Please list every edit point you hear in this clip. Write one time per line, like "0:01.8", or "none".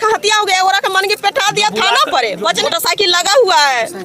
0:02.6